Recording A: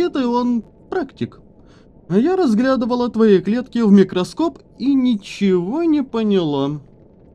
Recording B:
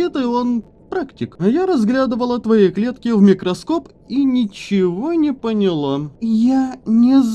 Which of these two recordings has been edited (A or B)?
B